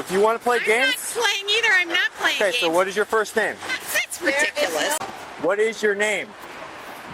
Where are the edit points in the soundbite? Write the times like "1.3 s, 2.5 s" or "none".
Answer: 5.0 s